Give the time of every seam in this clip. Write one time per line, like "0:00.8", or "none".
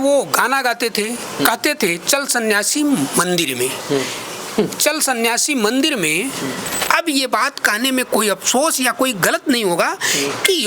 0:06.8